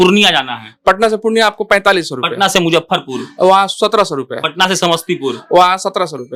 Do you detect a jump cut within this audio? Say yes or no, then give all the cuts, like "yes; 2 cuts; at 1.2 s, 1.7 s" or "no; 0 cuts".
no; 0 cuts